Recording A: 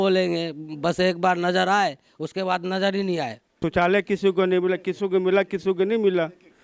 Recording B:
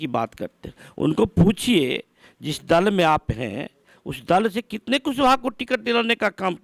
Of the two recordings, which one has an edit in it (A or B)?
A